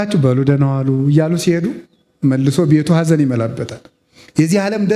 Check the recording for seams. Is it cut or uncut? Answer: uncut